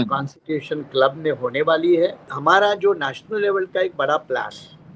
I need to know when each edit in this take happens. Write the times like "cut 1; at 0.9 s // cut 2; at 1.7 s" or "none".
cut 1; at 2.3 s